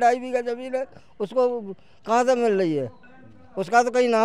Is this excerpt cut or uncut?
uncut